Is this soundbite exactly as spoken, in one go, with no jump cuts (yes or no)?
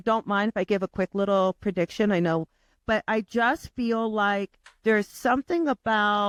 yes